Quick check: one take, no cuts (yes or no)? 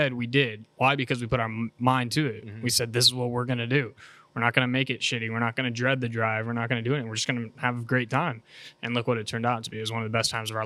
yes